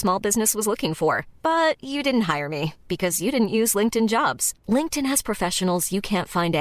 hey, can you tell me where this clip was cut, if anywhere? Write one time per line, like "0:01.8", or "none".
none

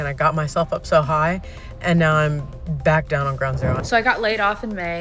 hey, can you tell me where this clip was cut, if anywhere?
0:03.8

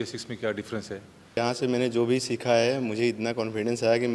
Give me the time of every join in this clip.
0:01.4

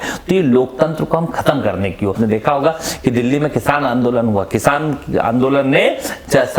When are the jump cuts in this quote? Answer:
0:02.1

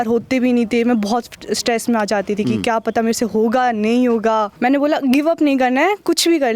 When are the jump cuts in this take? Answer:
0:04.5

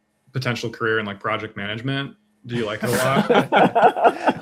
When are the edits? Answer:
none

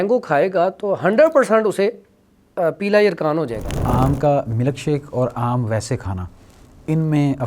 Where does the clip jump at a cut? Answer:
0:03.8

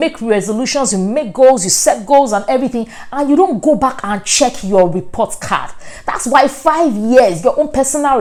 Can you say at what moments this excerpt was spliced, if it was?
none

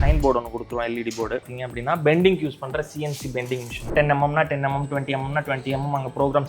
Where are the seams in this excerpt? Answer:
0:01.4
0:03.9

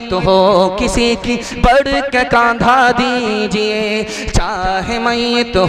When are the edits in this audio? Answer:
none

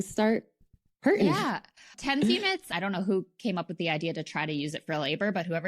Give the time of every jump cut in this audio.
0:01.9
0:02.7

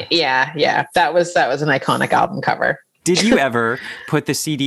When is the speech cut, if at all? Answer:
0:02.9

